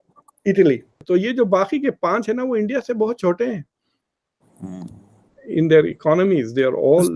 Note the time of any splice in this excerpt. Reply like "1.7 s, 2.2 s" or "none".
1.0 s